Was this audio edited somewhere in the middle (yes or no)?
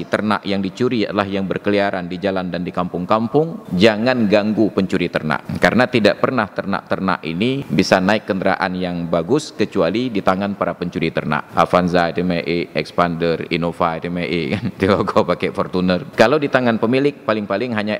yes